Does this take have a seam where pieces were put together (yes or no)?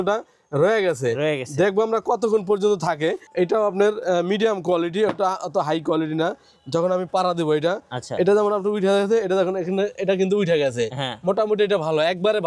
yes